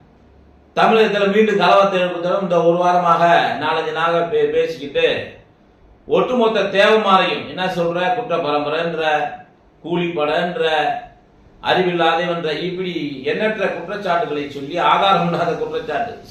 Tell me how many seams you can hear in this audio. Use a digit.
0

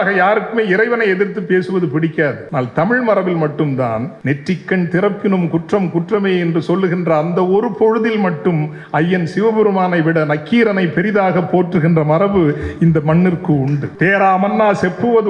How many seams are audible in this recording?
3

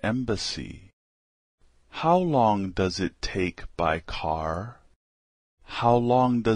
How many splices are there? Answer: 1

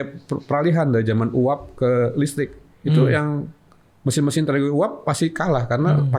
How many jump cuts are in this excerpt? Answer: 0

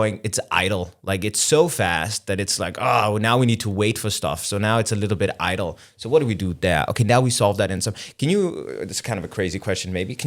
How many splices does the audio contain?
0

